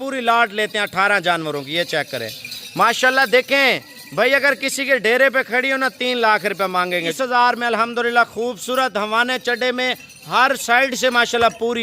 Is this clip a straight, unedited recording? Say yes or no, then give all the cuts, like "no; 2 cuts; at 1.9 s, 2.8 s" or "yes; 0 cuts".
no; 1 cut; at 7.1 s